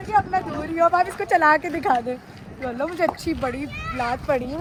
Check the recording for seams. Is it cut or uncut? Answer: uncut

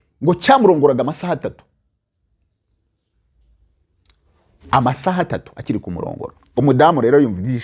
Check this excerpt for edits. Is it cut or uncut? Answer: uncut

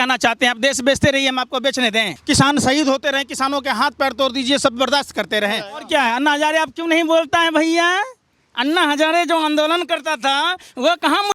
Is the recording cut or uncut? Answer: cut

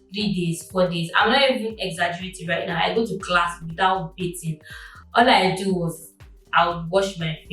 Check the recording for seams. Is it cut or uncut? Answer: uncut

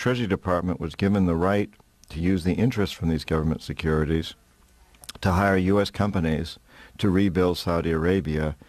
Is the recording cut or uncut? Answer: uncut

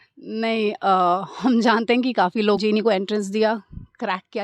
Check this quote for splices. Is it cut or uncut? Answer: cut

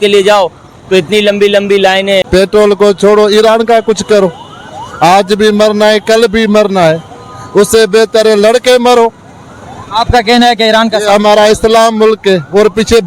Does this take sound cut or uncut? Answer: cut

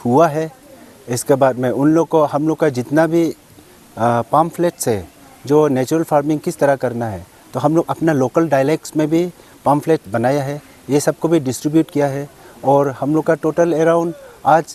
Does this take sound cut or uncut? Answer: uncut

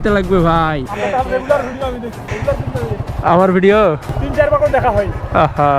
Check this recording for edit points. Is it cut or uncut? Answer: cut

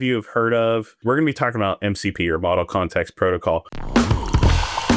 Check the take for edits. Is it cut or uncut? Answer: cut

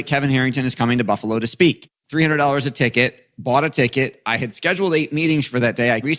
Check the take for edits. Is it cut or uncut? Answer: cut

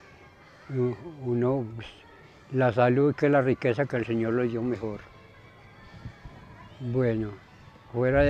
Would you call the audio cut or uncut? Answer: uncut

